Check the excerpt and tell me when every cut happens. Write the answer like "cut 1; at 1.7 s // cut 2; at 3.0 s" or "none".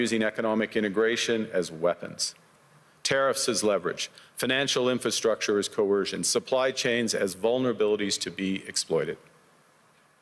none